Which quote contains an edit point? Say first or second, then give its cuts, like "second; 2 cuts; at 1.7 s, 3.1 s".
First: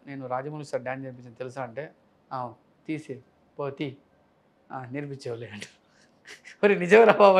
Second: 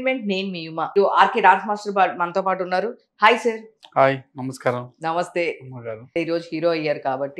second; 2 cuts; at 0.9 s, 6.1 s